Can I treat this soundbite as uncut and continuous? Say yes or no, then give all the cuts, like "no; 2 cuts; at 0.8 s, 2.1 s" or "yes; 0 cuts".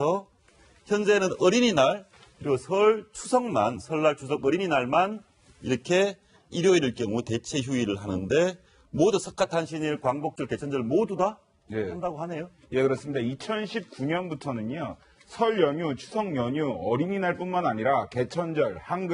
no; 1 cut; at 15.0 s